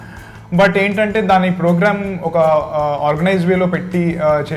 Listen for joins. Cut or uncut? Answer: uncut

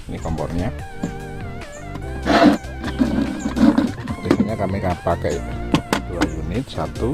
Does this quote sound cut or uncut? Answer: uncut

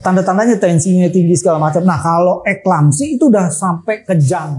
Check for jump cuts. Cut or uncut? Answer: uncut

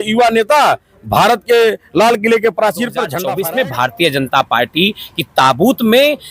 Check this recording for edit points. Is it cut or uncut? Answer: cut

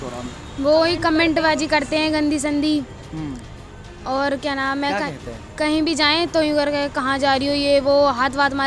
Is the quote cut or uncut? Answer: uncut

